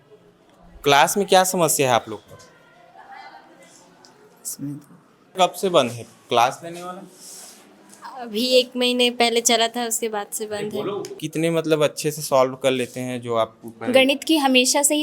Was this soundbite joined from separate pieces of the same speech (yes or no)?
yes